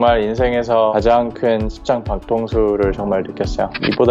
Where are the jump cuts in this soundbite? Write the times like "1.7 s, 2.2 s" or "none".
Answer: 0.9 s